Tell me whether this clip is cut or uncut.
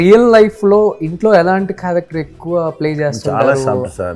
uncut